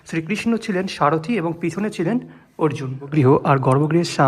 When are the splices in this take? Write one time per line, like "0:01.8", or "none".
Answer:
0:03.1

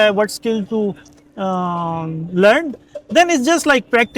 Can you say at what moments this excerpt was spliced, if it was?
none

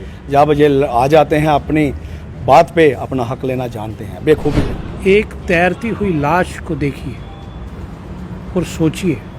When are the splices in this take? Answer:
0:04.7

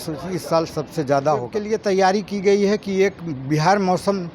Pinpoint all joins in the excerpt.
0:01.6

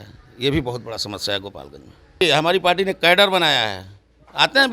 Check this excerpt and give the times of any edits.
0:02.2

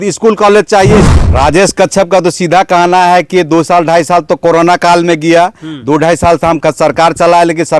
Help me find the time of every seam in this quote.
0:01.1

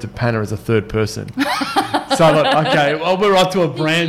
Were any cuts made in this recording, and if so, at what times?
none

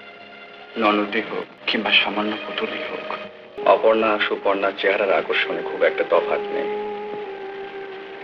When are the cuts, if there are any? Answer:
0:01.6
0:03.5

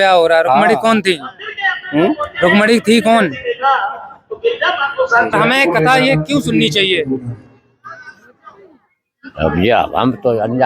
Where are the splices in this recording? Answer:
0:05.3

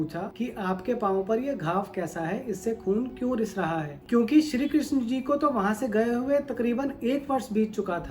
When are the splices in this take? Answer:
0:04.0

